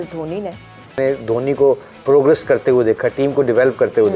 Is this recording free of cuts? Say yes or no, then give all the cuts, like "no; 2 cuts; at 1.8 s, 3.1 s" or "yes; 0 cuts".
no; 1 cut; at 1.0 s